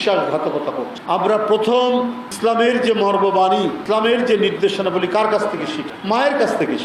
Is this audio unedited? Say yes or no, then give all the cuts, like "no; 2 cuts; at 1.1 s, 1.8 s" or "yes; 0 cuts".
no; 3 cuts; at 1.0 s, 3.8 s, 5.9 s